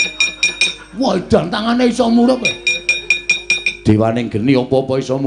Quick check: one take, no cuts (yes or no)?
yes